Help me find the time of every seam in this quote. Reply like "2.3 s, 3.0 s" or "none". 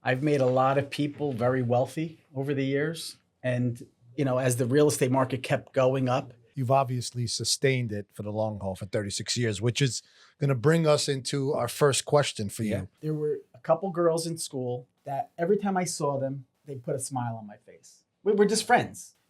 6.5 s, 12.9 s